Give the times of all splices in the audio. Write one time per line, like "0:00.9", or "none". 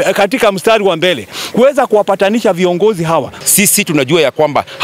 0:03.3